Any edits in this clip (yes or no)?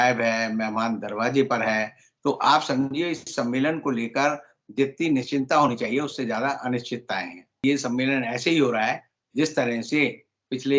yes